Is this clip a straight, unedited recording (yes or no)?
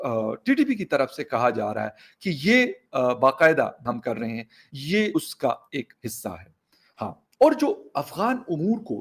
no